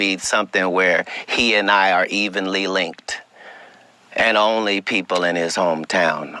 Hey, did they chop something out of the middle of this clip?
no; 0 cuts

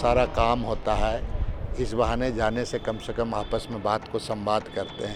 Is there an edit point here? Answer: no; 0 cuts

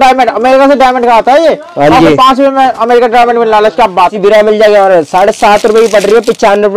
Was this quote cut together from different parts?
no; 0 cuts

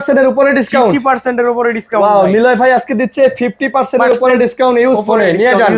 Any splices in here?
no; 0 cuts

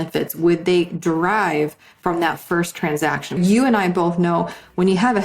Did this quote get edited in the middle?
yes; 1 cut; at 3.4 s

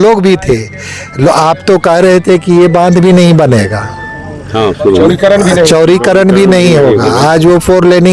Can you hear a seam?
no; 0 cuts

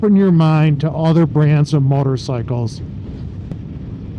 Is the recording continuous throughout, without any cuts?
yes; 0 cuts

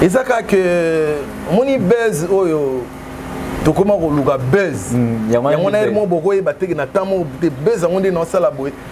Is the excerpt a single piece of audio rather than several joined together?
yes; 0 cuts

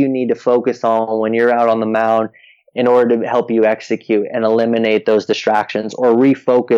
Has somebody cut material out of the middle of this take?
no; 0 cuts

